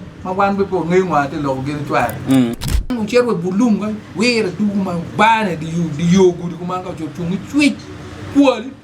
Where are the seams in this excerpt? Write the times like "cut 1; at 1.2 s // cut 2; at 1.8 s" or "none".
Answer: cut 1; at 2.9 s